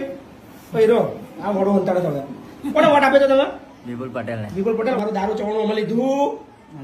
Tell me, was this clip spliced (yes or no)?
yes